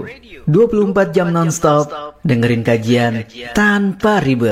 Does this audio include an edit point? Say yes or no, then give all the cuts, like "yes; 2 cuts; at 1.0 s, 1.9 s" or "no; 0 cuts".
no; 0 cuts